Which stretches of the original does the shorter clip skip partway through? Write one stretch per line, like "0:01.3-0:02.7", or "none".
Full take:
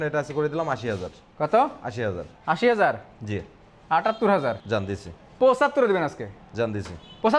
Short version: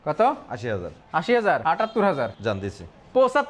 0:03.0-0:03.9